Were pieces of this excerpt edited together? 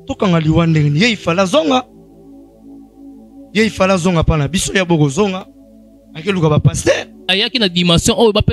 yes; 1 cut; at 7.3 s

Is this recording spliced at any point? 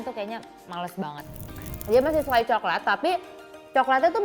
yes; 1 cut; at 1.7 s

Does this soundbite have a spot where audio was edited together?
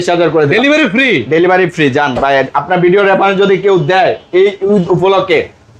no; 0 cuts

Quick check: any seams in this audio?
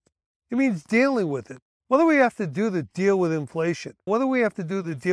yes; 1 cut; at 3.9 s

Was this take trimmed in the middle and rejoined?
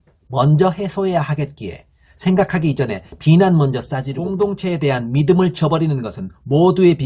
yes; 1 cut; at 4.2 s

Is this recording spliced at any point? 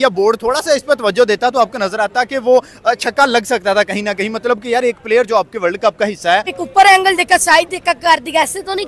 yes; 1 cut; at 6.5 s

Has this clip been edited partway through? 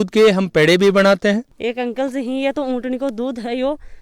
yes; 1 cut; at 1.6 s

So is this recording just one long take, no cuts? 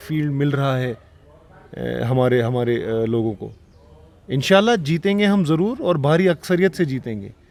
yes; 0 cuts

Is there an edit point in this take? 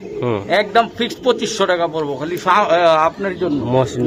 no; 0 cuts

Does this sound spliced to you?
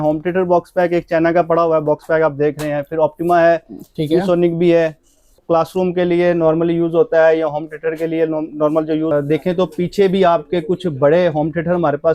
yes; 2 cuts; at 5.4 s, 9.1 s

